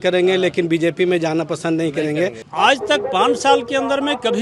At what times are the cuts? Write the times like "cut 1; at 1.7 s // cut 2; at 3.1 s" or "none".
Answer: cut 1; at 2.4 s